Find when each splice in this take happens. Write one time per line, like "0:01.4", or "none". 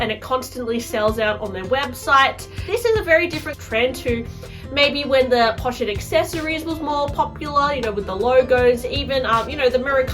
0:02.6
0:03.6

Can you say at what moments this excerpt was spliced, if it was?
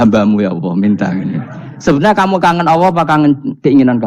none

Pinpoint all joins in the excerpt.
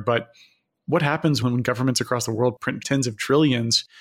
0:01.4
0:02.8

